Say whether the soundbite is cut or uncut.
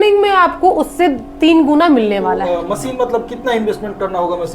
cut